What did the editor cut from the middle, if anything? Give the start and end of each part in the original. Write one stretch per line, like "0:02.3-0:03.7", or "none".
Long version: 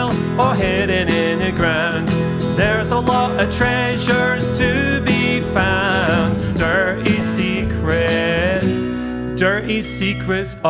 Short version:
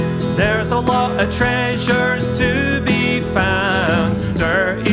none